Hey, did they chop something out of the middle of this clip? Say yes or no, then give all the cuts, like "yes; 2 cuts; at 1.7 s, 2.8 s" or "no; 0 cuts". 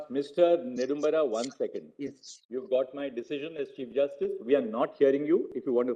no; 0 cuts